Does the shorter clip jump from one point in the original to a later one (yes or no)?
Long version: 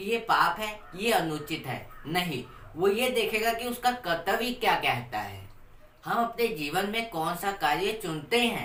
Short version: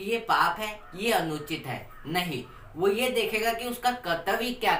no